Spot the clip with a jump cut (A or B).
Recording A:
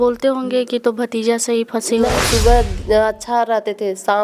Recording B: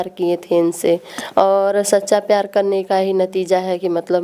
A